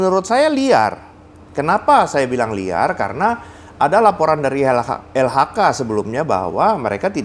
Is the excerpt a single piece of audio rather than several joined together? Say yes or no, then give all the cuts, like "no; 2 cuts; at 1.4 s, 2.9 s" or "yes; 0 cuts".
yes; 0 cuts